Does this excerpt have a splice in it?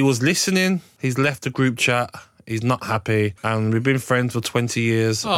yes; 2 cuts; at 0.9 s, 3.4 s

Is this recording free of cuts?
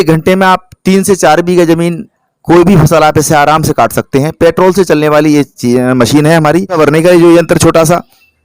no; 1 cut; at 6.7 s

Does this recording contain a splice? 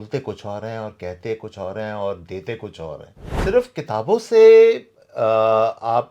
yes; 1 cut; at 3.3 s

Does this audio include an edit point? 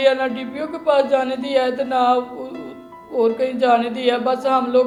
no; 0 cuts

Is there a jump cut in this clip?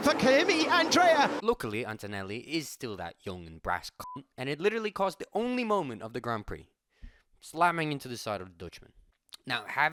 no; 0 cuts

